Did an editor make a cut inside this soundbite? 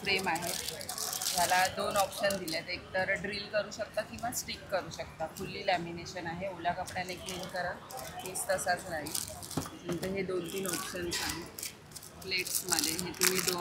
no; 0 cuts

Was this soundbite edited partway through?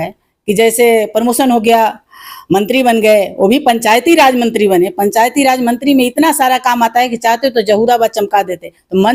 no; 0 cuts

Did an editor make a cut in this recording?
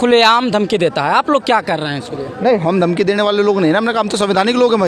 no; 0 cuts

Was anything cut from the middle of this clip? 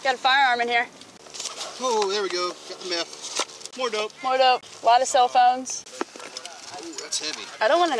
no; 0 cuts

